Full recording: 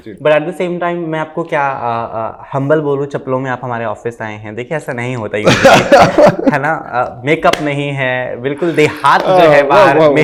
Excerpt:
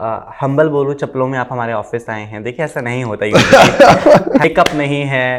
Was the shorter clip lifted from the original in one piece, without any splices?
no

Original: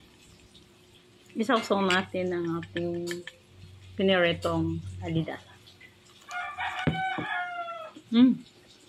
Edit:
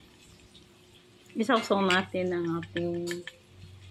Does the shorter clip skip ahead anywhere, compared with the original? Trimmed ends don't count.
no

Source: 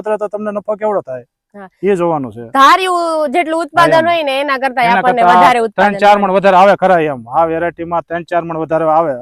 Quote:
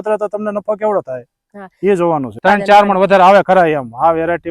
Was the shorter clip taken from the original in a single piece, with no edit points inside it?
no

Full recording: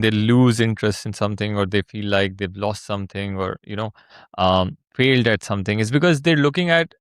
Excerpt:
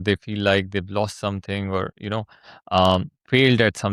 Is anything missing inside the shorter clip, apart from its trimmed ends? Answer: no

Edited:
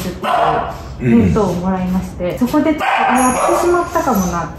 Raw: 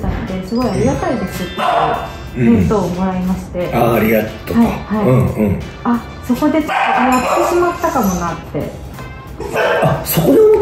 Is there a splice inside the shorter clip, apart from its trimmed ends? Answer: yes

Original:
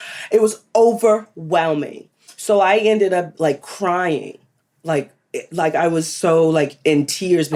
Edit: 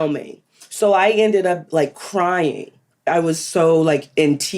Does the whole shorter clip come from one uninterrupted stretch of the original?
no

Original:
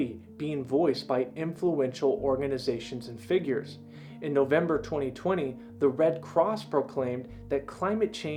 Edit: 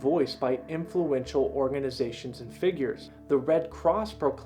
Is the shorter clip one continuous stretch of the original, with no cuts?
no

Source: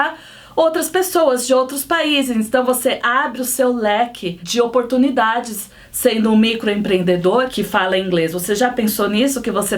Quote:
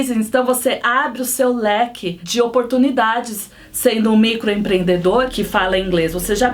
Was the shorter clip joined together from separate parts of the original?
no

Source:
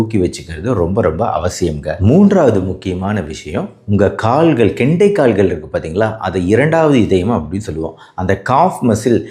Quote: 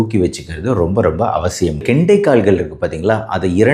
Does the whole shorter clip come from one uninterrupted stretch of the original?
no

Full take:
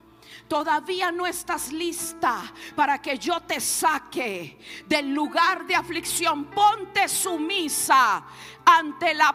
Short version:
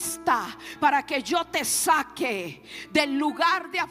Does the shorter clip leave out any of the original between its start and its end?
no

